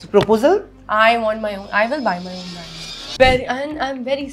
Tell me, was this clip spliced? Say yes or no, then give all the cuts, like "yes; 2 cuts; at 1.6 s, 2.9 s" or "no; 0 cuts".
yes; 1 cut; at 3.2 s